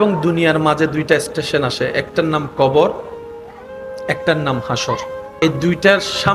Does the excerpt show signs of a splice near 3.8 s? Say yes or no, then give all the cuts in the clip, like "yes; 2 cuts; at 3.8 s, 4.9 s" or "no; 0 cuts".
no; 1 cut; at 5.2 s